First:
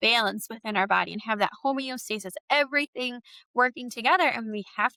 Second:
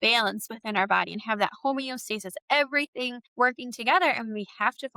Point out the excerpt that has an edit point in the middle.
second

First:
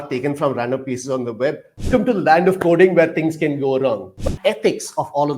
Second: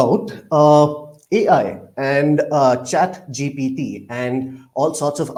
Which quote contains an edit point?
first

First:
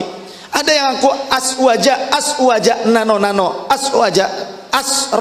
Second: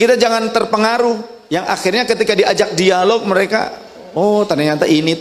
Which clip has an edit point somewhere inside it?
second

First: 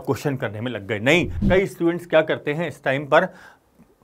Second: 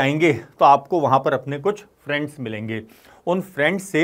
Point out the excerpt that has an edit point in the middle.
first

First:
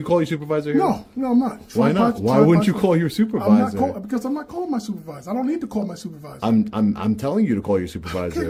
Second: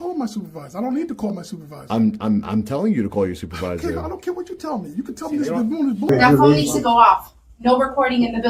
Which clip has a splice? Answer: second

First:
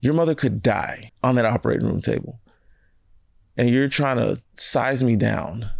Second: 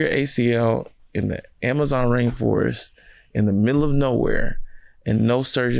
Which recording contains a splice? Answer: first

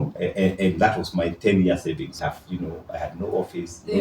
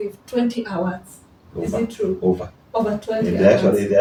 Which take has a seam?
first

